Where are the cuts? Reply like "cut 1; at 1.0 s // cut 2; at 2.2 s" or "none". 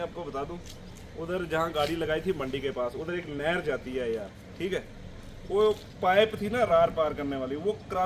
none